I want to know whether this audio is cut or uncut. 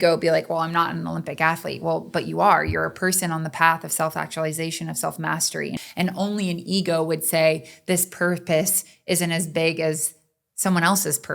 cut